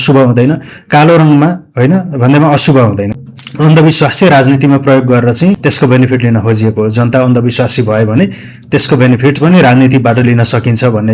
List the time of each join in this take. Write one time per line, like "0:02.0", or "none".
0:03.4
0:05.6